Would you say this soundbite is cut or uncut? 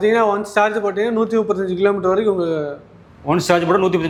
uncut